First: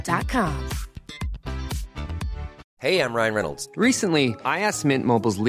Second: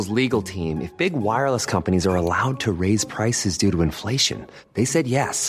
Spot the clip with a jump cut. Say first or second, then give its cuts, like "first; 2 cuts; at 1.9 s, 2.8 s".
first; 1 cut; at 2.6 s